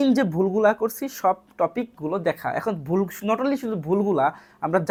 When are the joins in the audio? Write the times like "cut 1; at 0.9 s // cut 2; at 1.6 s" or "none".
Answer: none